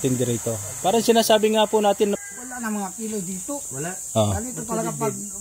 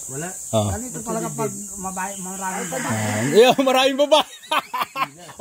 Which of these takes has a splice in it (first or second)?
first